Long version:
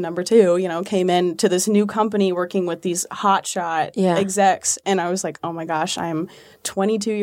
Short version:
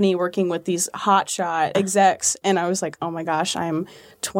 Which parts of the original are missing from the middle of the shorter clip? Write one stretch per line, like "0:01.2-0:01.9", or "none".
0:03.9-0:04.2